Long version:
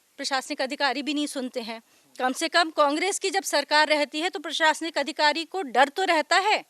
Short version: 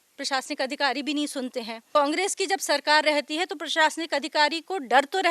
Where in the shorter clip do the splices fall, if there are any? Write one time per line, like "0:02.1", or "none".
0:01.9